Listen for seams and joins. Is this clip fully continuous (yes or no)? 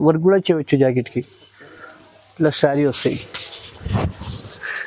yes